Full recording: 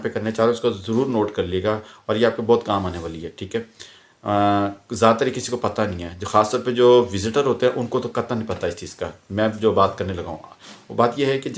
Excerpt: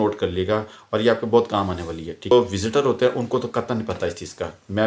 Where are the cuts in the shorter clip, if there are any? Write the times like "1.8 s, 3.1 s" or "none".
2.3 s